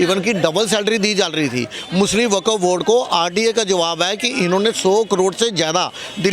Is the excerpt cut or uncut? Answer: uncut